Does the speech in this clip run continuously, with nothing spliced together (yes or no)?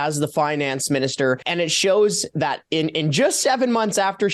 no